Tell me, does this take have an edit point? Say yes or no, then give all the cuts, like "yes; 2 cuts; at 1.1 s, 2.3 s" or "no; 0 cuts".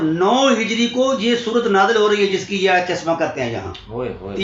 no; 0 cuts